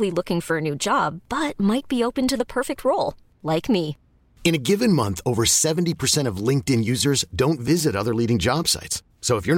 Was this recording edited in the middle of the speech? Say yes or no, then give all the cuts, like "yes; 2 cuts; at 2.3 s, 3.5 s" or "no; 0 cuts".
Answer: no; 0 cuts